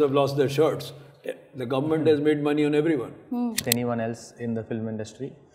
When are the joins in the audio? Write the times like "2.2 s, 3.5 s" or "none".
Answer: 3.6 s